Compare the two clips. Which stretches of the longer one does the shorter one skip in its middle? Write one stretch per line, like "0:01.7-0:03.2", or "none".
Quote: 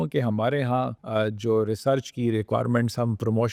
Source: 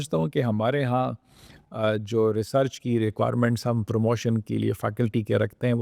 0:01.2-0:01.7